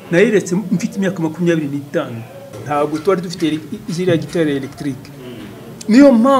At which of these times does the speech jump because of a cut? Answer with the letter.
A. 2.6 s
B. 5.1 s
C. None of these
A